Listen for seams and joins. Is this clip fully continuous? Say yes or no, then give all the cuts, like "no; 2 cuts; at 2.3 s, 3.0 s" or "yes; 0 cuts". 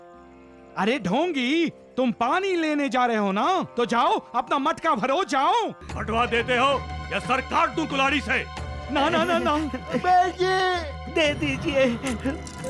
no; 1 cut; at 5.9 s